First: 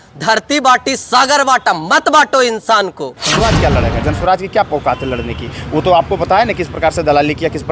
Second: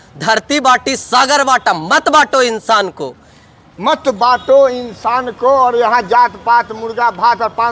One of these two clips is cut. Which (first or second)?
first